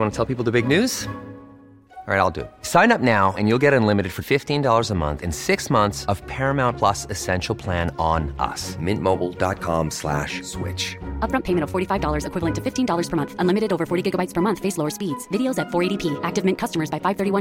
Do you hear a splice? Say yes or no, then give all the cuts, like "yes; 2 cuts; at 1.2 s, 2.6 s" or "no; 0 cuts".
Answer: no; 0 cuts